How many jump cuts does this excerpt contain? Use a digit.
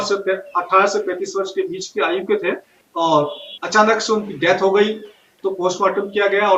0